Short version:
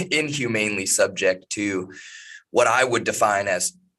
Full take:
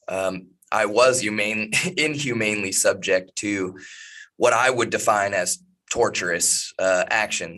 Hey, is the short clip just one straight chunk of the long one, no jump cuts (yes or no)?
yes